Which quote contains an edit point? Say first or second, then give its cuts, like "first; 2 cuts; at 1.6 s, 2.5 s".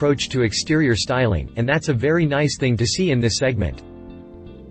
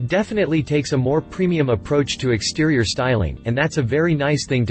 first; 1 cut; at 3.7 s